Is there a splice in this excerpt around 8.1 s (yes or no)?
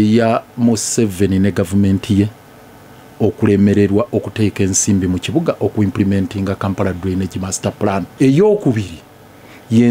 yes